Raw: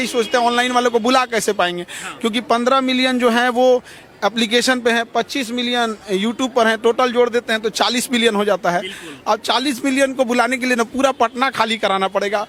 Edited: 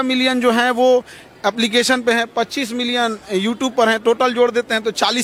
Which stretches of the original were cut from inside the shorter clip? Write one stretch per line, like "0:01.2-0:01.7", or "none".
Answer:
none